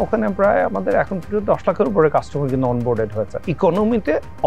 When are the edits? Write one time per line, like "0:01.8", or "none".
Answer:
0:03.4